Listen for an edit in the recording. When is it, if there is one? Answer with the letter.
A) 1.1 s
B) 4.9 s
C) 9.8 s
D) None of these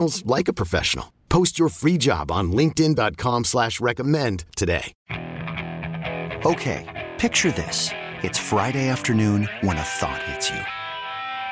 B